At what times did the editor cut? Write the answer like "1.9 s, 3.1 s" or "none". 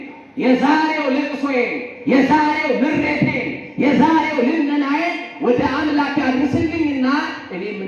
none